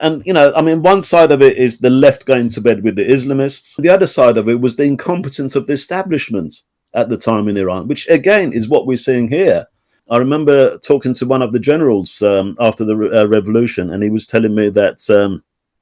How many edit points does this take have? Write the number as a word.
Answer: two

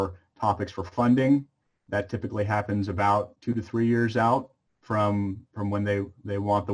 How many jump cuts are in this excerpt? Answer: one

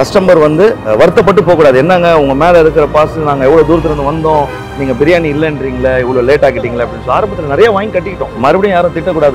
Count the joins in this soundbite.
two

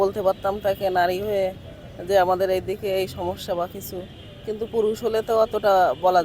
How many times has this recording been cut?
zero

